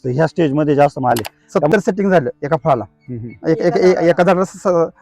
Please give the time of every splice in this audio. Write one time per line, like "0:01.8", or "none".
0:01.3